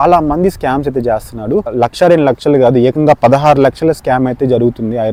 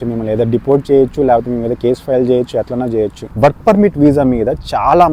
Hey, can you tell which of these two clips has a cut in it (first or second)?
second